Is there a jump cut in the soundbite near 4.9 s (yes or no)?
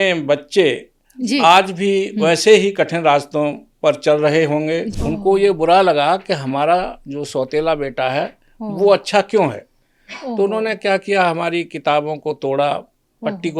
yes